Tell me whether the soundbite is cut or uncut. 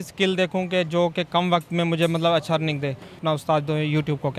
cut